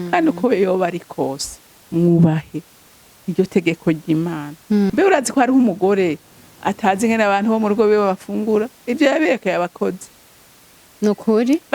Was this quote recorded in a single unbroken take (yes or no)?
no